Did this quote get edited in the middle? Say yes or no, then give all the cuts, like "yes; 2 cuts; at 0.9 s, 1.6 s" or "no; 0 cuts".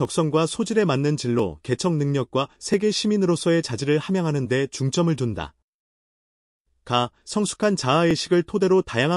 no; 0 cuts